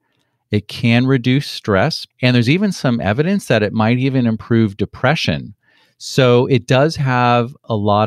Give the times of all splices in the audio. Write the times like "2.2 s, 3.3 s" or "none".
2.0 s